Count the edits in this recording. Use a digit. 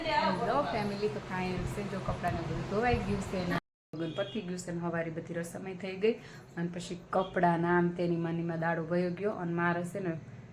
1